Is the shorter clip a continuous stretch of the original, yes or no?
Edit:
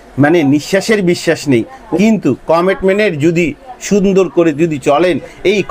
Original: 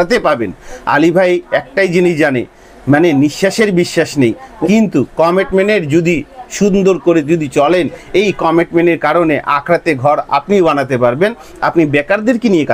yes